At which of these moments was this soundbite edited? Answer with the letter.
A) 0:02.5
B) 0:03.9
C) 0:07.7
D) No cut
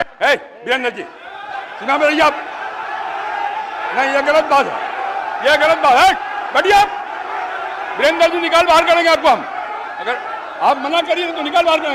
D